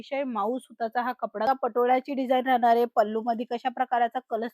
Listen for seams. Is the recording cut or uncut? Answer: cut